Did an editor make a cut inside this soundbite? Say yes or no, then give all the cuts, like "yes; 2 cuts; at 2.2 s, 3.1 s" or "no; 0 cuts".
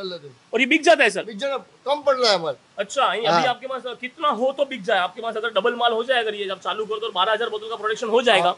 no; 0 cuts